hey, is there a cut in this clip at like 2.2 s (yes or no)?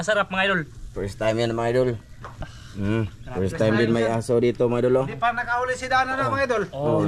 no